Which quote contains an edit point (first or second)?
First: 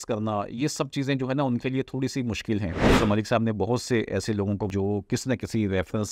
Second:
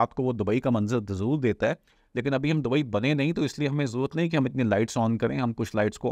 first